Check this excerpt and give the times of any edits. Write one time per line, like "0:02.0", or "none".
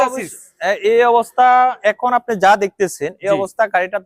none